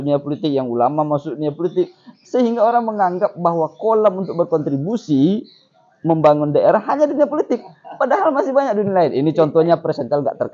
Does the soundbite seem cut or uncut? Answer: uncut